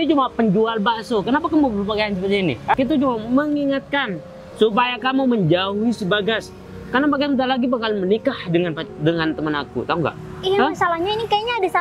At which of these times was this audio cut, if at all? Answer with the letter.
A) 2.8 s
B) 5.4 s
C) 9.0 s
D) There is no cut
A